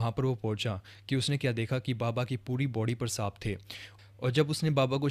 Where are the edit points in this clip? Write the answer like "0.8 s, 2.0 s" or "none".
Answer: none